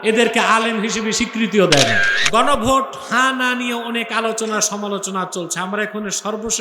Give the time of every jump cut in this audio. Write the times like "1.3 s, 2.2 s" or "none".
2.1 s

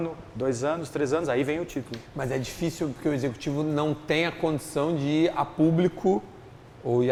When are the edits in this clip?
none

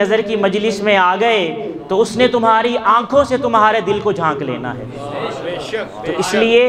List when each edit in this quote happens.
none

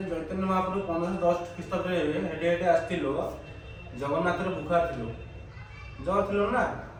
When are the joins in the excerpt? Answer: none

